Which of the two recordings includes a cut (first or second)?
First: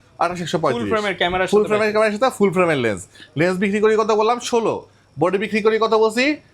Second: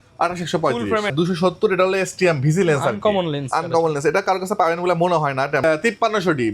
second